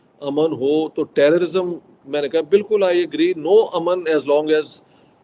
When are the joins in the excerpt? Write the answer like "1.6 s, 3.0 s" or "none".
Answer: none